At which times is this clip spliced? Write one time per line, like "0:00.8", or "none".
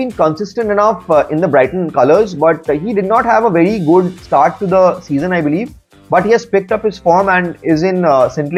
none